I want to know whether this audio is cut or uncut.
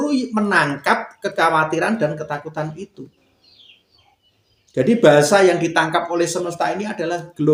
uncut